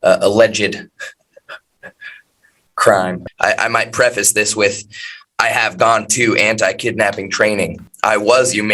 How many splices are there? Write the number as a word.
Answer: two